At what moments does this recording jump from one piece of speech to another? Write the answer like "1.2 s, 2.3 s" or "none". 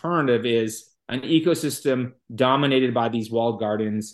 none